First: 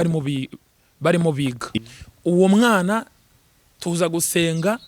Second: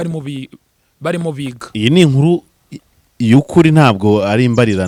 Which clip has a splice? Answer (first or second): first